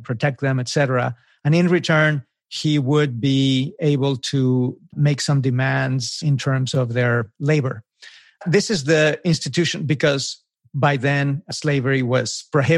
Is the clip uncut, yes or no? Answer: no